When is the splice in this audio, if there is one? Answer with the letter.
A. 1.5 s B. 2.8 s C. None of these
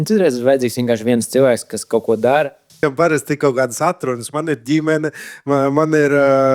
B